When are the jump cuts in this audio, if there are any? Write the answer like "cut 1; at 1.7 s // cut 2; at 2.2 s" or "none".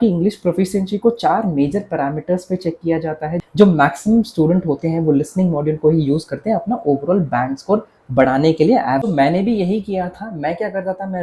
cut 1; at 3.4 s // cut 2; at 9.0 s

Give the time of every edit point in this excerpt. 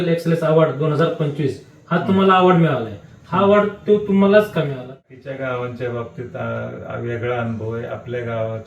cut 1; at 4.9 s

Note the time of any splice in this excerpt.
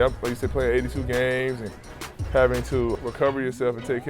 cut 1; at 2.9 s

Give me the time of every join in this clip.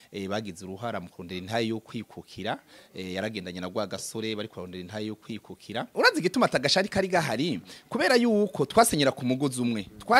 cut 1; at 5.9 s

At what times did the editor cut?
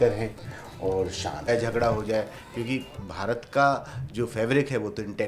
cut 1; at 1.5 s

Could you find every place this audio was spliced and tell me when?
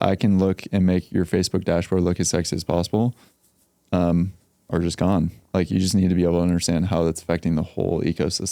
none

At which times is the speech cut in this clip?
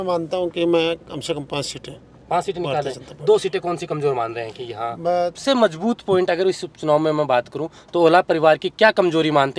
cut 1; at 5.4 s

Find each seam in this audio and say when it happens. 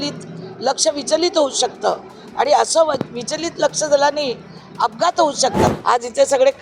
cut 1; at 5.7 s

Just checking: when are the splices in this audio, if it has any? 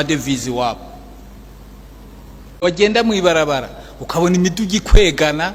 cut 1; at 2.7 s

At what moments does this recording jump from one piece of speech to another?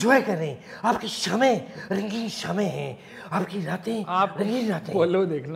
none

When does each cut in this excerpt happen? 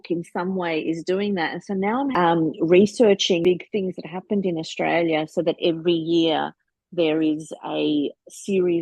cut 1; at 2.1 s // cut 2; at 3.4 s

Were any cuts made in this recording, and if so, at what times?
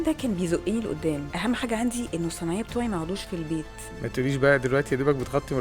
cut 1; at 1.3 s // cut 2; at 3.8 s

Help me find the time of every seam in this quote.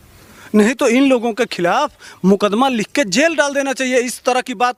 none

